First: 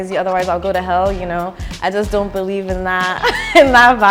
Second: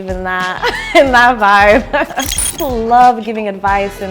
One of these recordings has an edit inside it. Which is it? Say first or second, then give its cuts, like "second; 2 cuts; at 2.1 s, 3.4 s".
second; 1 cut; at 2.4 s